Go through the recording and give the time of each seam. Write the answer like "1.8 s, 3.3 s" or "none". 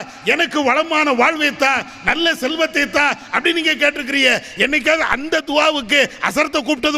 none